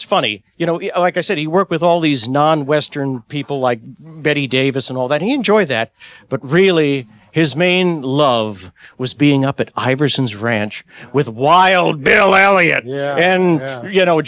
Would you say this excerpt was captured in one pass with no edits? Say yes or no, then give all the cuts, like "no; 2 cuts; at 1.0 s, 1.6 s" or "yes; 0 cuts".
yes; 0 cuts